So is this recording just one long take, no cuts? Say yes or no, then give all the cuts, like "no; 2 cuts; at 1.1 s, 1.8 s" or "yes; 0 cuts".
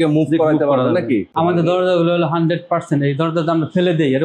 no; 1 cut; at 1.3 s